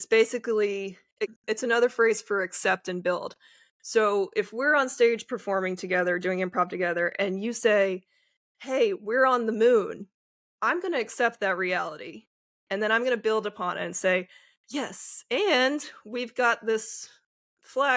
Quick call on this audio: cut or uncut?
cut